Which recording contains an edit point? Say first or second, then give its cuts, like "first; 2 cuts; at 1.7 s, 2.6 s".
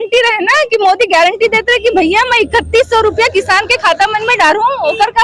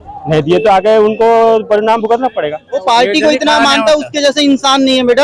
second; 1 cut; at 2.8 s